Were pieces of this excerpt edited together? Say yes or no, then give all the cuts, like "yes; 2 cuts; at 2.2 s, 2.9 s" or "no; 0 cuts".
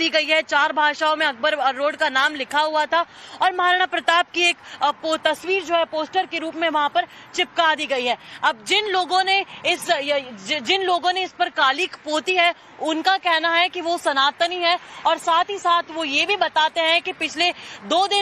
no; 0 cuts